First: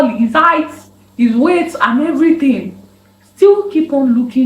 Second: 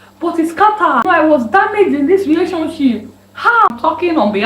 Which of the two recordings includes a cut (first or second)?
second